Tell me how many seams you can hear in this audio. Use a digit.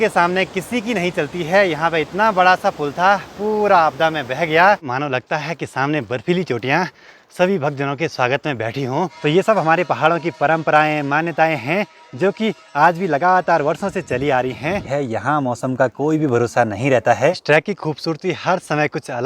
4